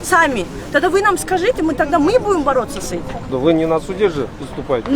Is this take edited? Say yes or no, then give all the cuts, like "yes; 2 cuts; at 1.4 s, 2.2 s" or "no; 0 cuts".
yes; 1 cut; at 3.3 s